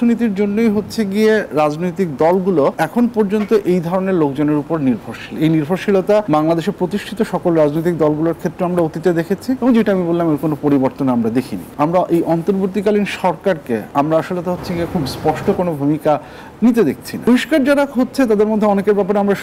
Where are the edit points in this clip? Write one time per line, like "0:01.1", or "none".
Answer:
0:02.8
0:06.2
0:09.6
0:11.6
0:13.9
0:17.2